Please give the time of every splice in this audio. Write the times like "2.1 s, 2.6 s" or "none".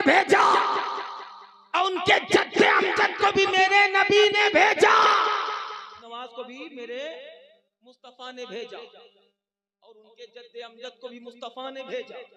6.0 s